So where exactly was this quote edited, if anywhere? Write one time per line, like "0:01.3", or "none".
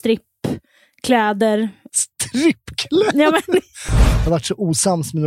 0:01.9
0:04.1

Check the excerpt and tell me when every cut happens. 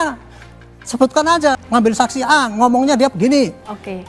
0:01.6

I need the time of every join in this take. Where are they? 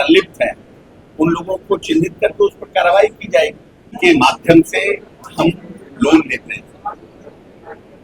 0:04.0

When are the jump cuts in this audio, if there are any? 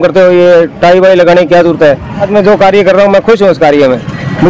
0:02.3

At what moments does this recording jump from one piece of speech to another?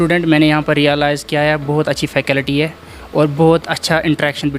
none

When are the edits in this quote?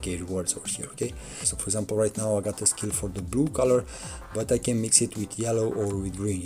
0:01.5

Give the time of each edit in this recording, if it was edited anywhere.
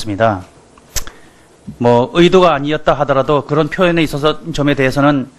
0:02.6

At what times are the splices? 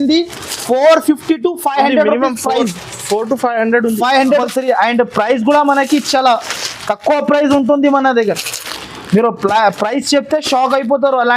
0:04.4

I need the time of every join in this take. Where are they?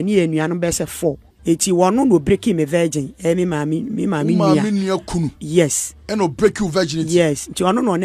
0:01.3

